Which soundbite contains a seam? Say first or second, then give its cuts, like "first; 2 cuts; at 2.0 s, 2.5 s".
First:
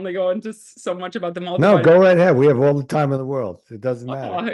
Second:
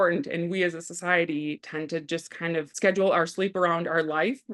second; 1 cut; at 2.7 s